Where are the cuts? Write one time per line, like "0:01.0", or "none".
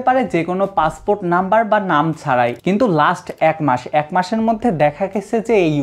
0:02.6